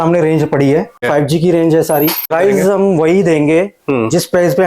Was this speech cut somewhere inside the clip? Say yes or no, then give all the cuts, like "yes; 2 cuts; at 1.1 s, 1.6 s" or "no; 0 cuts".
yes; 2 cuts; at 1.0 s, 2.3 s